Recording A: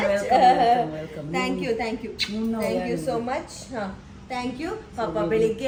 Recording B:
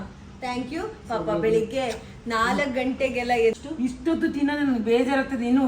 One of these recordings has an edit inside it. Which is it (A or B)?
B